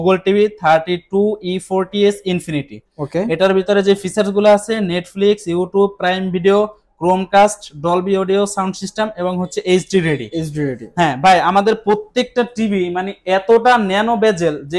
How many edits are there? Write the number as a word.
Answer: zero